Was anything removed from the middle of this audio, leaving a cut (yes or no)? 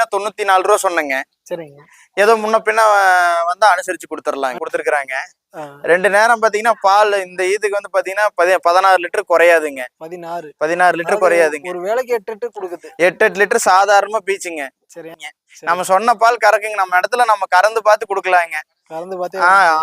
yes